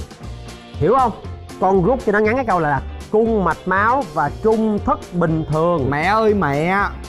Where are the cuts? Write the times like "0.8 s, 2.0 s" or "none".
1.6 s